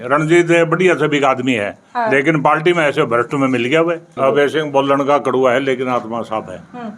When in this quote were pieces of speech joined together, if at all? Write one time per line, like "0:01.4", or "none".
0:04.1